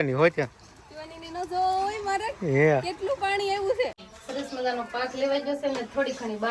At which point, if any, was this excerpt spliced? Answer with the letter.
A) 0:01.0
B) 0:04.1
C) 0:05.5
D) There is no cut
B